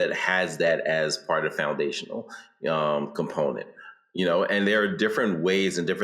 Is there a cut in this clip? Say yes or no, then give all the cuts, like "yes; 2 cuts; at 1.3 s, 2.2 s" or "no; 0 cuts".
no; 0 cuts